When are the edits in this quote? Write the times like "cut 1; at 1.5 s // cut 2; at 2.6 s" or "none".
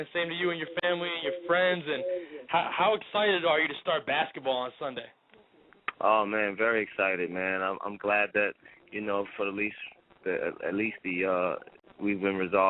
cut 1; at 6.8 s